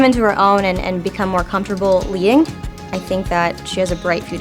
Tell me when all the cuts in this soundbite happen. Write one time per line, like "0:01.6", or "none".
0:02.9